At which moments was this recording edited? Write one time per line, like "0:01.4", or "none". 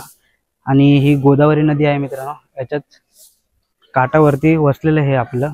none